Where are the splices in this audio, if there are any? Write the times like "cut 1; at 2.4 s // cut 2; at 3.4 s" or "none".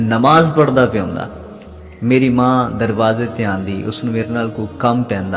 none